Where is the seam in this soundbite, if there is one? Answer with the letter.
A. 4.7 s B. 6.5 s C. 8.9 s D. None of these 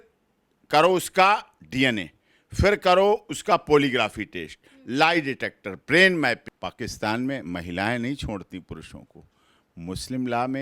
B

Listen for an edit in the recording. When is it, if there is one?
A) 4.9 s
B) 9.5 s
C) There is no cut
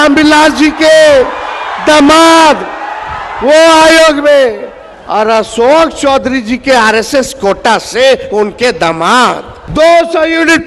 B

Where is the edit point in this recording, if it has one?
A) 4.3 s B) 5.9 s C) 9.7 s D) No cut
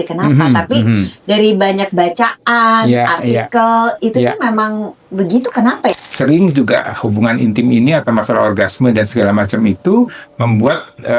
B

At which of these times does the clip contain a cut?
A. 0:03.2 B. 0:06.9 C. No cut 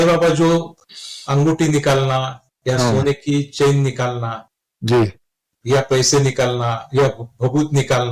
C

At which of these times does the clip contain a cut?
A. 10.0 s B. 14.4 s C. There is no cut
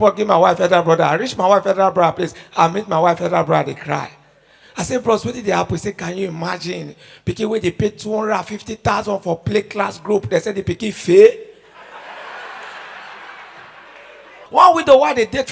B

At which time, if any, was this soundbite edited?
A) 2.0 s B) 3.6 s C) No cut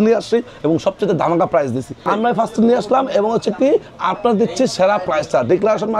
A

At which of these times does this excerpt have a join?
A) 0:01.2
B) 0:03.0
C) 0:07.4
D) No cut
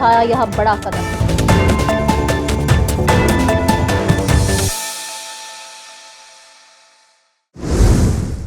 C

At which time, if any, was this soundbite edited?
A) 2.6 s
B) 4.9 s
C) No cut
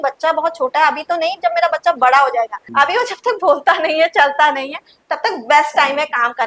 A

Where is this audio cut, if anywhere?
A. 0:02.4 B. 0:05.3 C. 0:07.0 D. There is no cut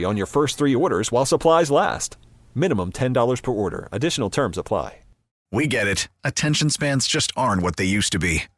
B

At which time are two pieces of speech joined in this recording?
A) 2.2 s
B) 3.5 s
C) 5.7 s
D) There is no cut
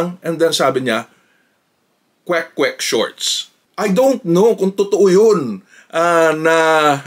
B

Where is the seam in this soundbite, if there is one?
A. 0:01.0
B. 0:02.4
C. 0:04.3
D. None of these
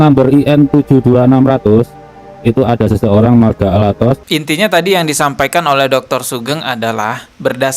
C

